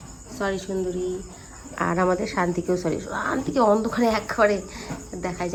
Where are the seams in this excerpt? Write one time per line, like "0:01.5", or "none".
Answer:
none